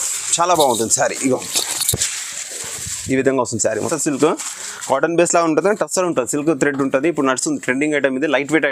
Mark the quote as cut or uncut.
cut